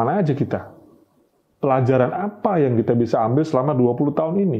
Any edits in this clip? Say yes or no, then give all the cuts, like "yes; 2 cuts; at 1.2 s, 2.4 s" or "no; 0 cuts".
no; 0 cuts